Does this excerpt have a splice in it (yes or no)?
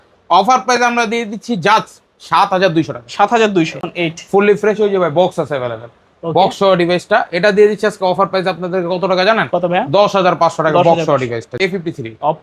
yes